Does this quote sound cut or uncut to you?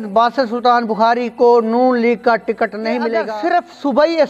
cut